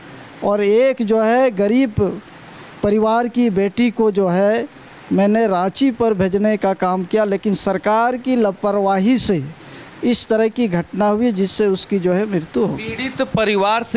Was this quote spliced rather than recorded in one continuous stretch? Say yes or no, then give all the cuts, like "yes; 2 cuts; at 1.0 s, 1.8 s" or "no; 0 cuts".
no; 0 cuts